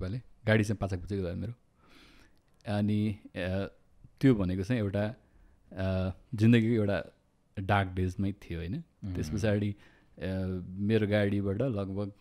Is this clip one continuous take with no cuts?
yes; 0 cuts

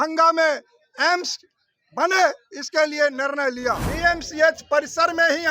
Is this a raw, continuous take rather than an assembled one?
no; 1 cut; at 3.9 s

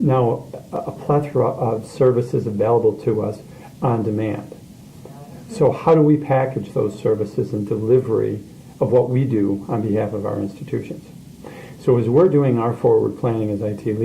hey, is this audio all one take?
no; 1 cut; at 8.7 s

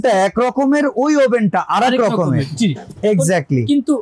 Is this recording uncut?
yes; 0 cuts

